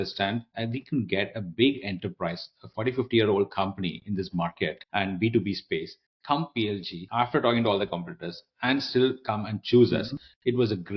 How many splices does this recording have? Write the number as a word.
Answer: two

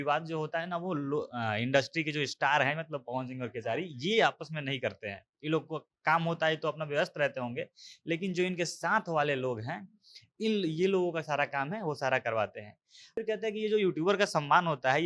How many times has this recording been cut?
one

